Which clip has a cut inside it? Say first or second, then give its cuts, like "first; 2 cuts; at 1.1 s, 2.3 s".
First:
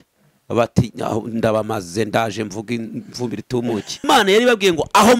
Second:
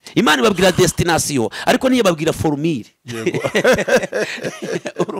first; 1 cut; at 4.0 s